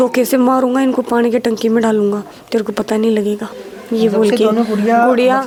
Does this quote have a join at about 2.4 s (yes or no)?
no